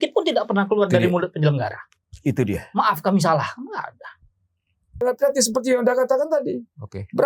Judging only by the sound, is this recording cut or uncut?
cut